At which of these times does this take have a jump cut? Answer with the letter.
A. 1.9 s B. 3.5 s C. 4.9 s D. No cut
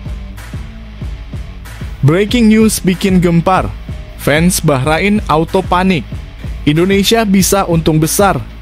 A